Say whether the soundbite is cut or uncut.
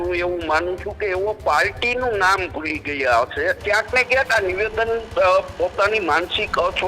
cut